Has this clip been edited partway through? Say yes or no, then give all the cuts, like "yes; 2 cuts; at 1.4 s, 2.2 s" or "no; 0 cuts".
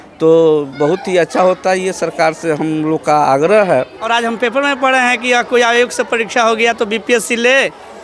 yes; 1 cut; at 4.0 s